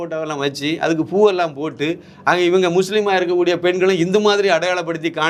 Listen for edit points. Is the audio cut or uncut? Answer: uncut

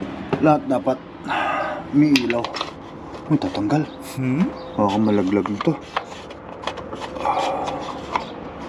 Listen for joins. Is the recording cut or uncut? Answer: uncut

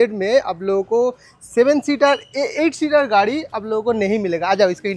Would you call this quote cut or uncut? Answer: uncut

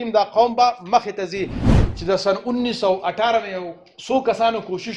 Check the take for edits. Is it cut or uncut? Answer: cut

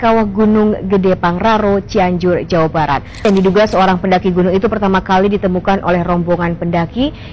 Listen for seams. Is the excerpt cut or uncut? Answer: cut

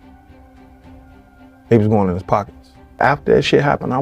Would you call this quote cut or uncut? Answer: cut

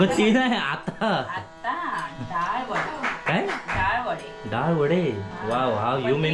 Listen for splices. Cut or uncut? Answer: uncut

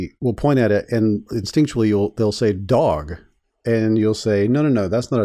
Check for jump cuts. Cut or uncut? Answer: cut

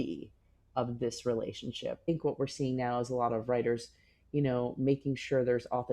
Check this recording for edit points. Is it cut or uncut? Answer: cut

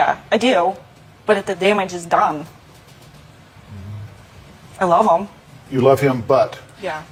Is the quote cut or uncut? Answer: uncut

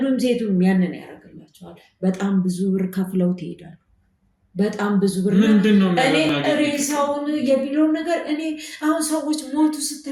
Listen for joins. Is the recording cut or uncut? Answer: uncut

